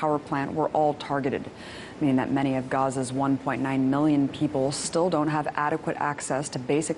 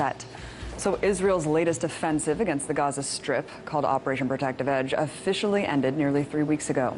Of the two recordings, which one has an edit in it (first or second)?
first